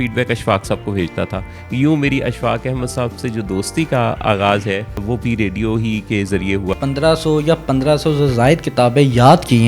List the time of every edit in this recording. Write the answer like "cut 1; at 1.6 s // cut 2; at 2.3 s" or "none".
cut 1; at 5.0 s // cut 2; at 6.7 s